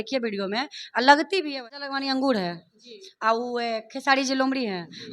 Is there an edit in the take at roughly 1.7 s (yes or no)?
yes